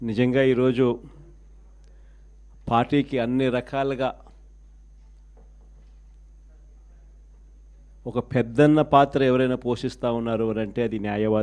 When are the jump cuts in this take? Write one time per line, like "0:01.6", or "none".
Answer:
none